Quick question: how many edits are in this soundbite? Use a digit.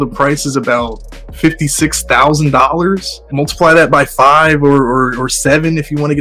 1